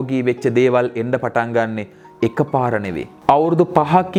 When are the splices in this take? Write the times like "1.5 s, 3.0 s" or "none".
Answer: none